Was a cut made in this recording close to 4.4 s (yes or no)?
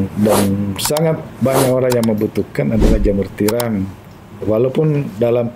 yes